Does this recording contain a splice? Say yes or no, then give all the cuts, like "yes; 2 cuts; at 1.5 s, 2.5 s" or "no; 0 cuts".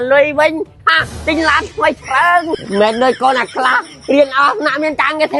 no; 0 cuts